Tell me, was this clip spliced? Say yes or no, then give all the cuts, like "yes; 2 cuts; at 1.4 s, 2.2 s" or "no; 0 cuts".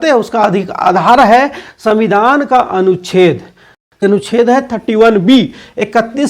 yes; 1 cut; at 4.0 s